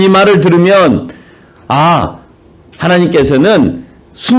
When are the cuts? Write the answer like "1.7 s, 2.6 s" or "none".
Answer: none